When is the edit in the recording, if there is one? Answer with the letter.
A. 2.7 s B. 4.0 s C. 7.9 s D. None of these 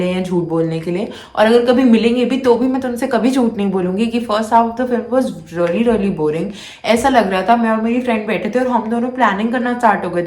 D